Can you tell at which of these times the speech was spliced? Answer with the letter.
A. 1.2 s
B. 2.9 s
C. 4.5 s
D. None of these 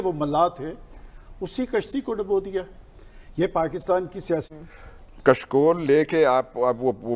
C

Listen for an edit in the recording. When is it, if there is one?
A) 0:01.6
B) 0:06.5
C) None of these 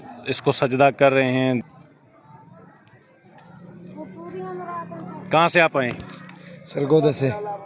A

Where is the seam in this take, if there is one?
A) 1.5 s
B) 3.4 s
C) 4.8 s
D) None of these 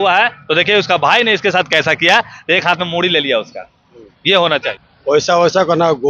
C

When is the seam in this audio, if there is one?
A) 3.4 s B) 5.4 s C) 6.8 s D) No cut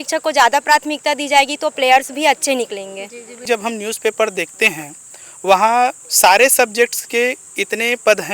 A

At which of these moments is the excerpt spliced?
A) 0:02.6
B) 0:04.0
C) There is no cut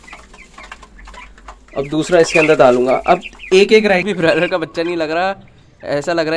B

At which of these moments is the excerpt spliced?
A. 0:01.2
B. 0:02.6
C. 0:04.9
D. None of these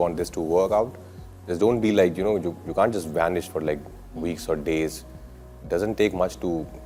D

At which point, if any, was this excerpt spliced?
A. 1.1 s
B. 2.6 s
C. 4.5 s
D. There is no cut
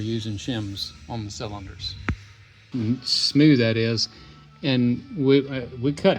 B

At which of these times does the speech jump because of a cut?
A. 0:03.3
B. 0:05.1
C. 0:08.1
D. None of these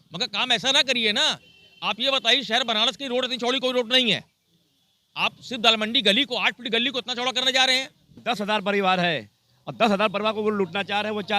C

